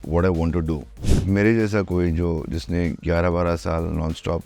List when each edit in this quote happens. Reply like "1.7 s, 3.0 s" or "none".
1.1 s